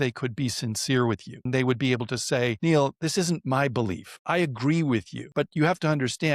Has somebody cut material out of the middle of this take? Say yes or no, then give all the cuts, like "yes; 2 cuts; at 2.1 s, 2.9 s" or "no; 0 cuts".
yes; 4 cuts; at 1.5 s, 2.6 s, 4.1 s, 5.2 s